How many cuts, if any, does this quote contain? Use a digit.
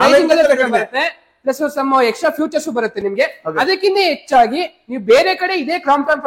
0